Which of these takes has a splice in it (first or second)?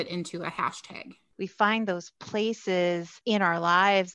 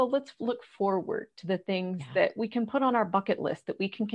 first